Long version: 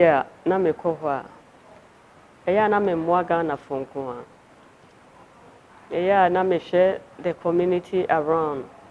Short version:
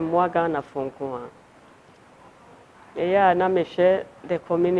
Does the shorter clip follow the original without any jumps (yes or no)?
yes